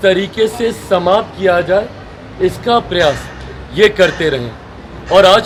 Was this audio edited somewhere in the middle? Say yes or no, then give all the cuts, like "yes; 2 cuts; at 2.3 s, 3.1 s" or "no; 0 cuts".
no; 0 cuts